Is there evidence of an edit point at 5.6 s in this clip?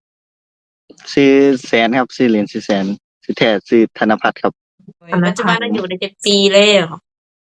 yes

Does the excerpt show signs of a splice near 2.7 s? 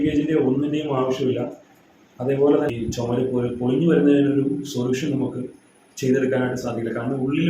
yes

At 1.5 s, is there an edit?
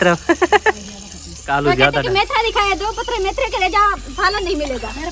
yes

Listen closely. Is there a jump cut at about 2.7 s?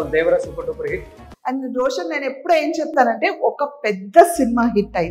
no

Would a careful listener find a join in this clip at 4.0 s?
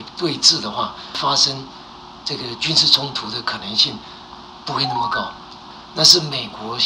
no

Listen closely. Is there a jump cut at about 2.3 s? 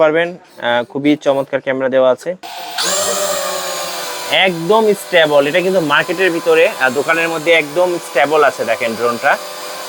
yes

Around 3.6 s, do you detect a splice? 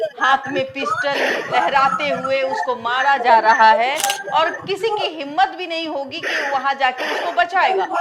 no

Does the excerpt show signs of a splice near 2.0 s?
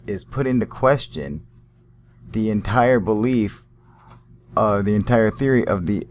yes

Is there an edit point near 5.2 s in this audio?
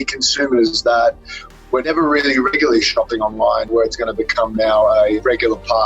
yes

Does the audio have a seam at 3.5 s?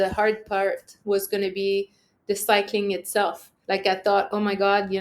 yes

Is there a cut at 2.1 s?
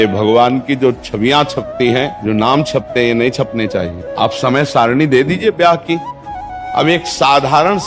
yes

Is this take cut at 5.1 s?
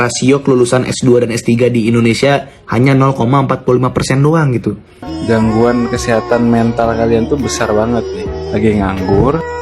yes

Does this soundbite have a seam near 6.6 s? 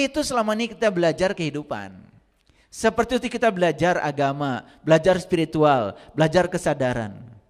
no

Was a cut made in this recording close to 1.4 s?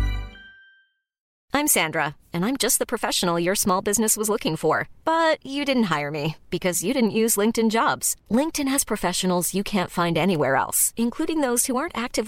yes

